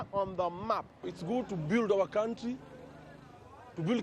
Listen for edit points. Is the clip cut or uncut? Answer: cut